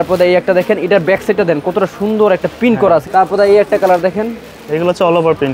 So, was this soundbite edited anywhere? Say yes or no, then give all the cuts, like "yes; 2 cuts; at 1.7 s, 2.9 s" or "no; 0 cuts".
yes; 1 cut; at 3.1 s